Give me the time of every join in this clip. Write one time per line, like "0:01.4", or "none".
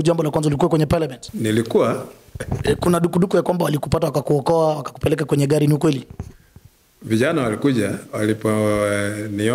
0:01.2
0:02.4